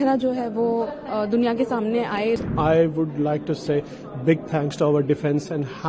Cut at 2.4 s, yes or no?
yes